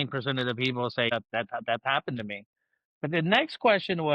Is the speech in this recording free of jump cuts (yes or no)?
no